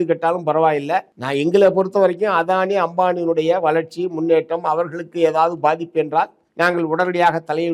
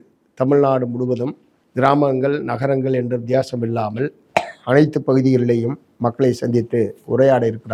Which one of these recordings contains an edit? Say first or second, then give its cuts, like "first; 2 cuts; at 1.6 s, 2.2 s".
first; 2 cuts; at 1.2 s, 6.4 s